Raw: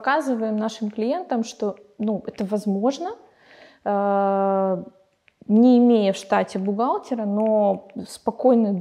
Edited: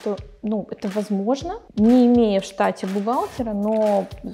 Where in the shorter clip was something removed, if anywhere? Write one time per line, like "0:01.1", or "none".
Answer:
0:01.6